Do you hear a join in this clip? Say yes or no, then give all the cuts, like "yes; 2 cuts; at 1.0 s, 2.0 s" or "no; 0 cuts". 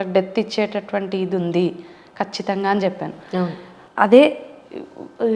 no; 0 cuts